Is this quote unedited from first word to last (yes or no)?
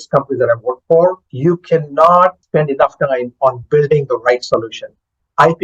no